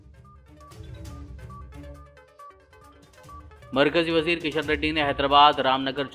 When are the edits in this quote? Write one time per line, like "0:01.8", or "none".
0:01.6